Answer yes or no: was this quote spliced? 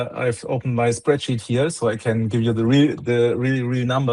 no